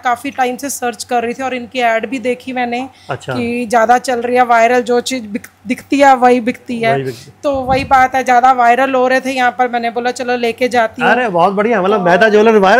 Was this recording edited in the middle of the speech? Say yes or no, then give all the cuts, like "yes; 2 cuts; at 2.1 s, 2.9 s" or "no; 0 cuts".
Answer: no; 0 cuts